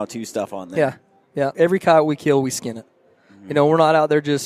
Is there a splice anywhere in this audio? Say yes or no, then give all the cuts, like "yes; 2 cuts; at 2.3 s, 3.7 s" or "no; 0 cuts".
yes; 1 cut; at 1.5 s